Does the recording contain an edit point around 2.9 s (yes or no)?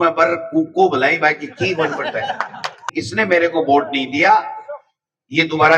yes